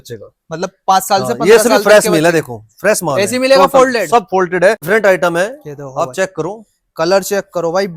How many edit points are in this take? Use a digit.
1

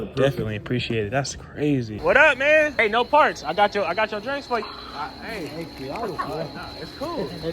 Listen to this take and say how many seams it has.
3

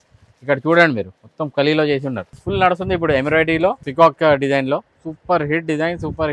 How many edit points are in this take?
2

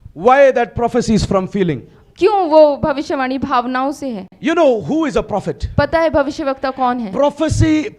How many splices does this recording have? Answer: 1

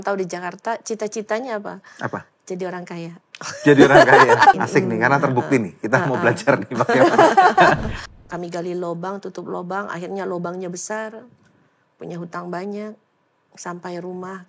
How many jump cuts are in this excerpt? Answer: 2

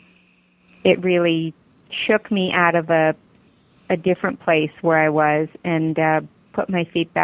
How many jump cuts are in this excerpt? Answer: 0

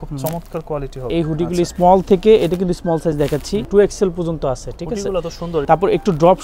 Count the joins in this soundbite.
3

